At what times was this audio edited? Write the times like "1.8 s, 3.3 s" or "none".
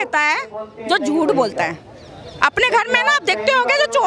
none

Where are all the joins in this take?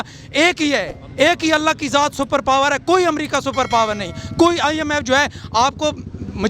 none

